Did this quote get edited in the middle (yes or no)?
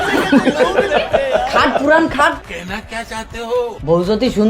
yes